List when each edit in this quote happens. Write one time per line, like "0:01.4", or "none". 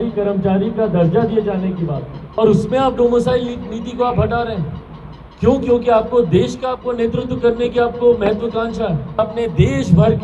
0:02.1
0:09.2